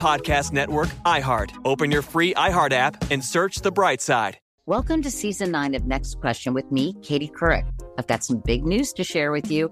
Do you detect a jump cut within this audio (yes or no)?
yes